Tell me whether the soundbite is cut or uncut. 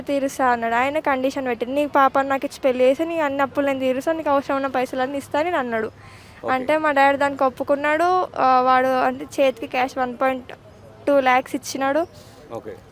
uncut